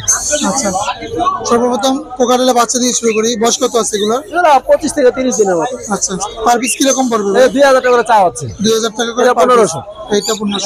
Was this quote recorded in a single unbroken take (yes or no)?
yes